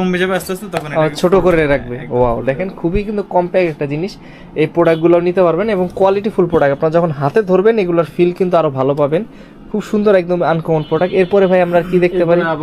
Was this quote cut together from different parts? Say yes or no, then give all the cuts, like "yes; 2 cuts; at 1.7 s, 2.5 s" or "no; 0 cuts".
no; 0 cuts